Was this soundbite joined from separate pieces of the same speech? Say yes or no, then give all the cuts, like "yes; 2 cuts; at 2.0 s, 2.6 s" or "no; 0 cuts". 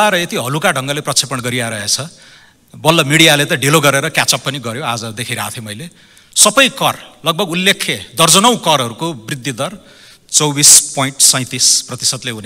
no; 0 cuts